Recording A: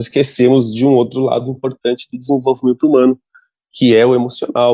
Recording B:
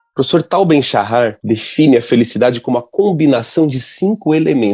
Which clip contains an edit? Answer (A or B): B